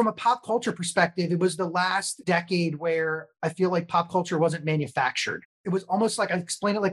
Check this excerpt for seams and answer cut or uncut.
cut